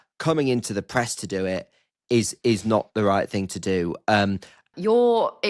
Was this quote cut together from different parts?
yes; 1 cut; at 4.6 s

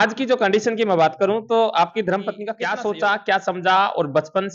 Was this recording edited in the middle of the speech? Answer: yes; 1 cut; at 2.5 s

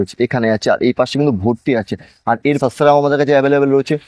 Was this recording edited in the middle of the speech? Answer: yes; 1 cut; at 2.6 s

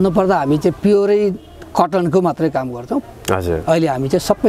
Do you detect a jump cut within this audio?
yes; 1 cut; at 3.0 s

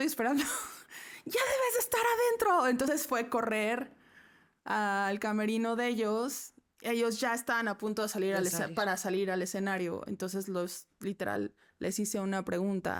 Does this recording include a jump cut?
no; 0 cuts

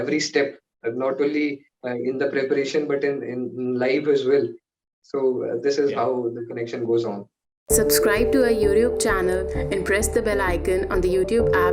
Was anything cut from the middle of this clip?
yes; 1 cut; at 7.5 s

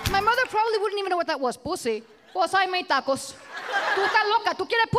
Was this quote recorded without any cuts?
no; 2 cuts; at 2.2 s, 3.9 s

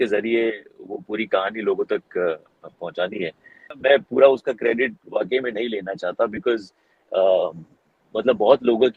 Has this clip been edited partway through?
yes; 1 cut; at 3.8 s

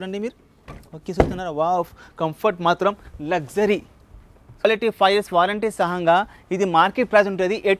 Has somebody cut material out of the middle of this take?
yes; 1 cut; at 4.6 s

